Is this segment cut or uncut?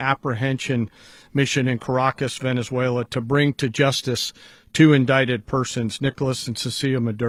uncut